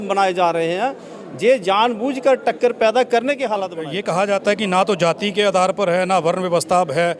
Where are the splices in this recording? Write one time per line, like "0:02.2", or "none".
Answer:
0:03.8

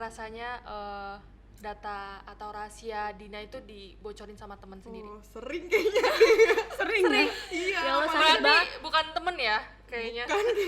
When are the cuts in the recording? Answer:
none

